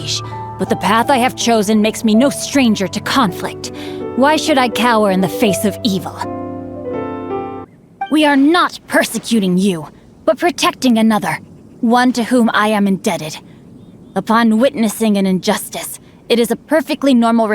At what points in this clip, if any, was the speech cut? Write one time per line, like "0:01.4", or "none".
0:07.6